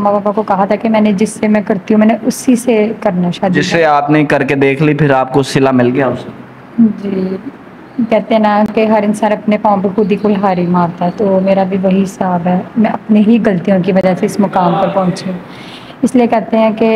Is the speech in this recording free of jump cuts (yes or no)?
yes